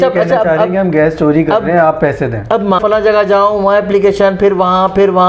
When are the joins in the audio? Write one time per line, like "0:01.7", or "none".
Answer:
0:02.8